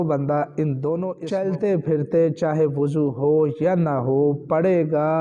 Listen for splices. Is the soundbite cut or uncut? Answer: cut